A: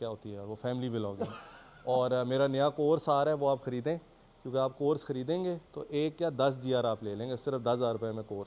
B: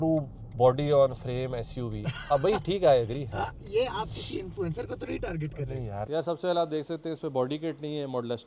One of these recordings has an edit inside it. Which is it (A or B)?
B